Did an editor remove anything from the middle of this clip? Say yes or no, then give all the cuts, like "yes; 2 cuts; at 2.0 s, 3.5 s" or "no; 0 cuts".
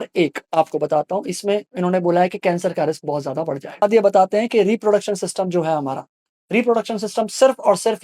yes; 1 cut; at 3.8 s